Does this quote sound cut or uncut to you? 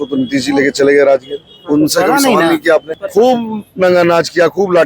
cut